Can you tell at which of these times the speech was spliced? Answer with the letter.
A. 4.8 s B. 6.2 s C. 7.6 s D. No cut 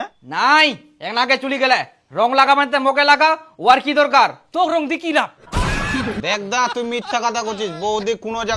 B